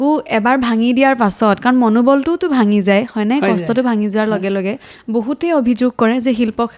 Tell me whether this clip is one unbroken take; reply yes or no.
no